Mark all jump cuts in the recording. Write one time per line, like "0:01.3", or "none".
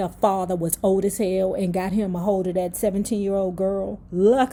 none